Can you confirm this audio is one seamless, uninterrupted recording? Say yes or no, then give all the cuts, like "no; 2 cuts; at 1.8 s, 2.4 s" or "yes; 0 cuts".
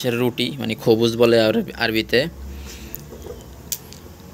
yes; 0 cuts